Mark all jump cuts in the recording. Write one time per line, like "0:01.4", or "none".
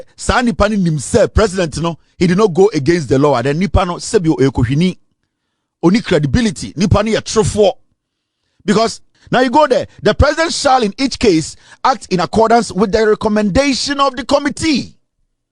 0:09.1